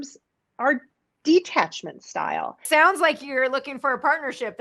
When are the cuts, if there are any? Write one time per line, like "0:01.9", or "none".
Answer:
0:02.6